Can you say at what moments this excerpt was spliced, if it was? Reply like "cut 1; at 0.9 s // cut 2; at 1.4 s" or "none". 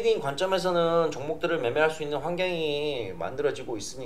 none